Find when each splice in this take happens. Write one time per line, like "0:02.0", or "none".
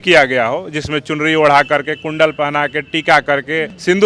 none